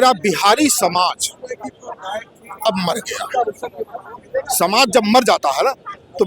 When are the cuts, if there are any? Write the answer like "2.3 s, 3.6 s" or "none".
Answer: 4.2 s